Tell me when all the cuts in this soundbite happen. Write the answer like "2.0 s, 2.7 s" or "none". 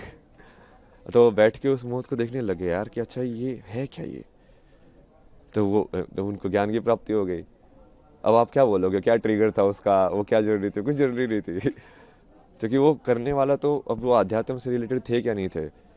none